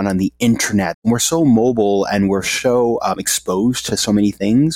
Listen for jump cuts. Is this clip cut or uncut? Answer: cut